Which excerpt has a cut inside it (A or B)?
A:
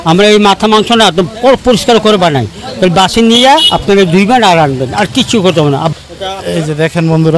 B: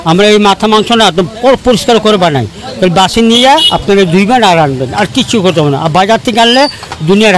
A